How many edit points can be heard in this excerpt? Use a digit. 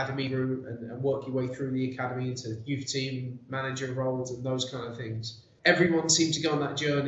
1